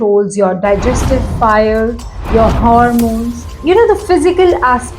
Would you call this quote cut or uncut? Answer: cut